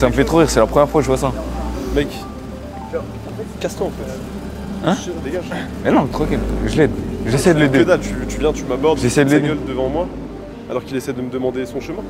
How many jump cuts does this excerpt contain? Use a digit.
0